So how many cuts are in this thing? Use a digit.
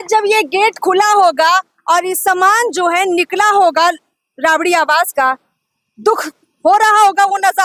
0